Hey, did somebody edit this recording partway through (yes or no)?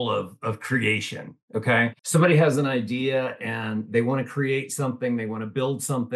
yes